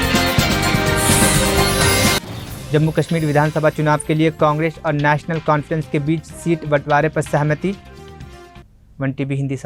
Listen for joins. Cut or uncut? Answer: uncut